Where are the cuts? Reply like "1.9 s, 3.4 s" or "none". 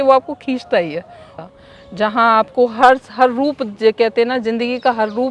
1.3 s